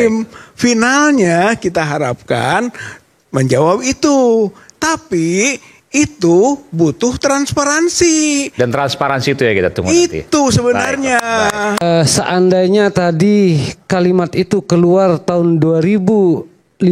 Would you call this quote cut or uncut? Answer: cut